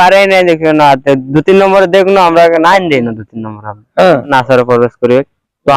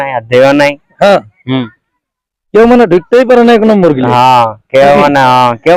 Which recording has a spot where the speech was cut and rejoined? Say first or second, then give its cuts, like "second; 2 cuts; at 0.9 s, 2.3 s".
first; 1 cut; at 4.3 s